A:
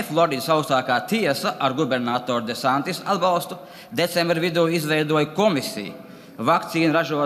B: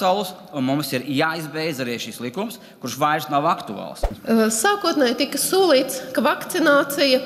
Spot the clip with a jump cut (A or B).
B